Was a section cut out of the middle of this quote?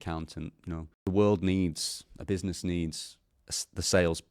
yes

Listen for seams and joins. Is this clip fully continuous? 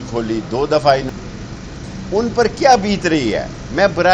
no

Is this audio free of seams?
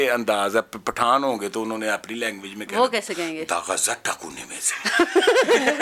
yes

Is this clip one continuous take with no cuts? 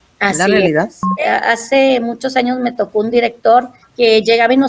no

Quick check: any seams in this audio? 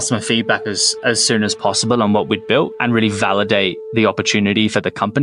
no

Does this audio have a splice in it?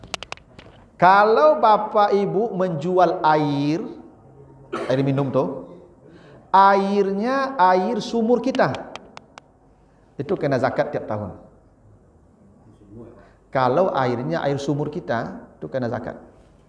no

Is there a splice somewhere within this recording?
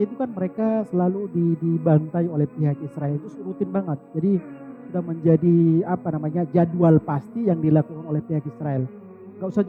no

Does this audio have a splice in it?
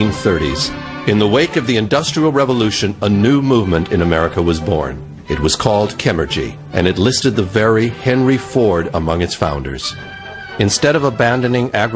no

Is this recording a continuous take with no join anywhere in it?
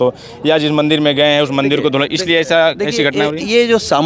yes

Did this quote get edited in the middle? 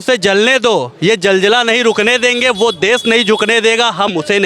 no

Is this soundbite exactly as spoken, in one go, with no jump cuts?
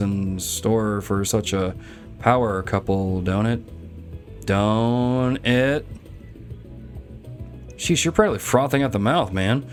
yes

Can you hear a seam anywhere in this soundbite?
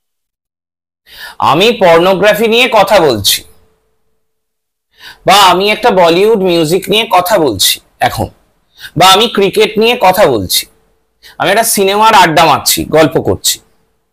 no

